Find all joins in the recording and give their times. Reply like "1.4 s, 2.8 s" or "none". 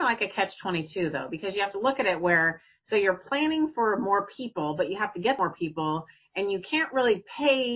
5.4 s